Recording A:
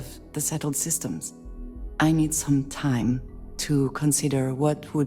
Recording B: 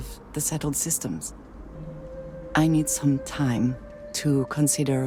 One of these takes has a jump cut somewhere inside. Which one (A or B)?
A